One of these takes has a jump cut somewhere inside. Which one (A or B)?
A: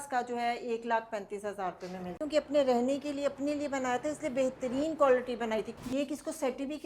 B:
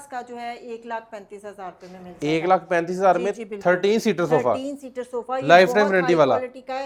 A